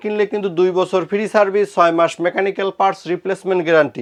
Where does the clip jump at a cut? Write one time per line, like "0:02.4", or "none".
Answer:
none